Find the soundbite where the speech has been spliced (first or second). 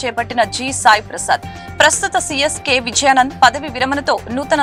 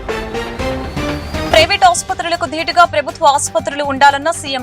second